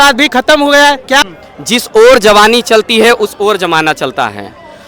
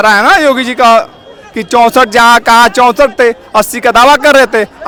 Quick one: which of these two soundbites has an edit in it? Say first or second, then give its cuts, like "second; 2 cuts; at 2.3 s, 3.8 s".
first; 1 cut; at 1.2 s